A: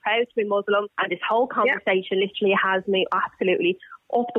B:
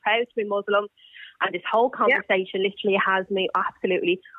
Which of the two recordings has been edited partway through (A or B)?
A